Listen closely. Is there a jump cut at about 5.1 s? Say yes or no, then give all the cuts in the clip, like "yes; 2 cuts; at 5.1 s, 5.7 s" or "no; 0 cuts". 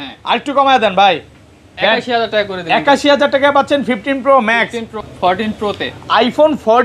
yes; 1 cut; at 5.1 s